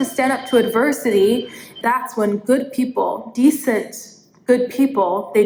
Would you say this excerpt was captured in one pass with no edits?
yes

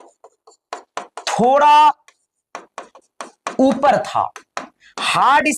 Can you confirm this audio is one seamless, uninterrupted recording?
yes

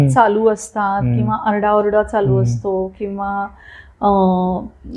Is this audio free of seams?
yes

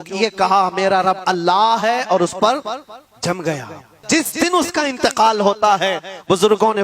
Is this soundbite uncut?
no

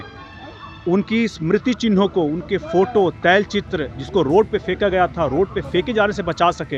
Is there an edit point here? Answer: no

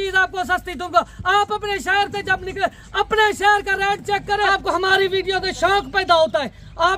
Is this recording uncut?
no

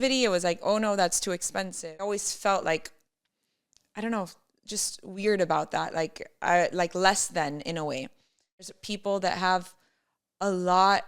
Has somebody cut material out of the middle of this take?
yes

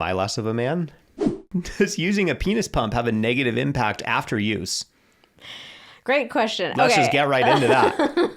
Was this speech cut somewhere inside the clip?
yes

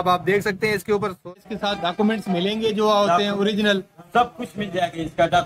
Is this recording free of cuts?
no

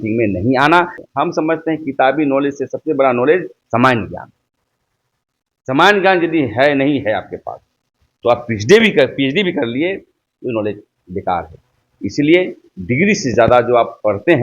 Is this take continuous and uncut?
no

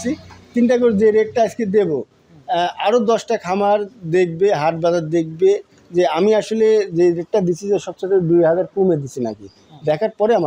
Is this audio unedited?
yes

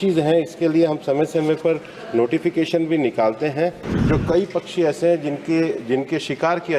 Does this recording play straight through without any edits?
no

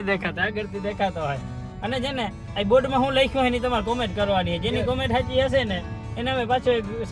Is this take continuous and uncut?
yes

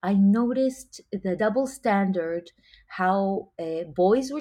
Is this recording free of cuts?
no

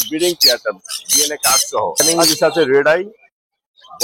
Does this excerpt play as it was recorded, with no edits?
no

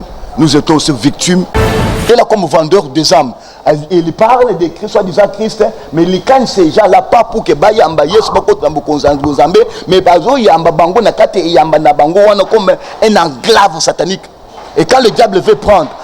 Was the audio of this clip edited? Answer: yes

